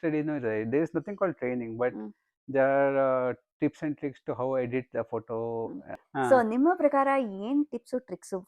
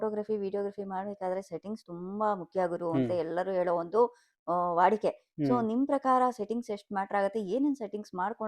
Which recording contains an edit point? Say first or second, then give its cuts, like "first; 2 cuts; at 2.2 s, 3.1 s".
first; 1 cut; at 6.0 s